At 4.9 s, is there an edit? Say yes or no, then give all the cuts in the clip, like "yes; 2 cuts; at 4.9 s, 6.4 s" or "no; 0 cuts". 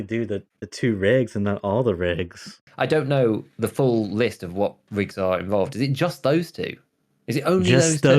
no; 1 cut; at 2.6 s